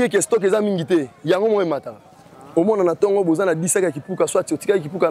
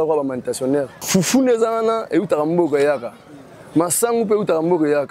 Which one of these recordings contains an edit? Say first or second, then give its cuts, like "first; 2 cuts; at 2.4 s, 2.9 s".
second; 1 cut; at 1.0 s